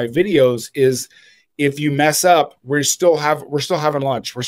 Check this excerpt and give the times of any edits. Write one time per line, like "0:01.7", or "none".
none